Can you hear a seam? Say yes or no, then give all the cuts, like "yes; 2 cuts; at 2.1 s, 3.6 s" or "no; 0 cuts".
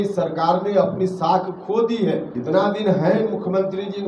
yes; 1 cut; at 2.3 s